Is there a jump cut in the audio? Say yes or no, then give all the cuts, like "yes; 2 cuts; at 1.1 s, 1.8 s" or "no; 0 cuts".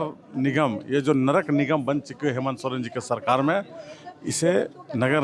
no; 0 cuts